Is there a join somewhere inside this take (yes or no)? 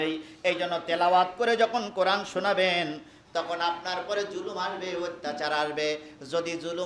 no